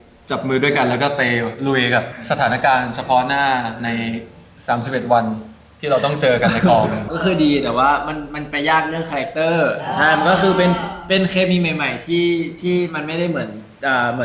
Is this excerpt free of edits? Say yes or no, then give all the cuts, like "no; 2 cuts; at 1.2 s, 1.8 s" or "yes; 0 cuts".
no; 2 cuts; at 2.2 s, 7.1 s